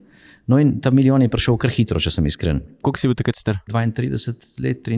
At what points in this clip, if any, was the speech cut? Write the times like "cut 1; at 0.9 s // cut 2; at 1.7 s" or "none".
cut 1; at 2.8 s // cut 2; at 3.7 s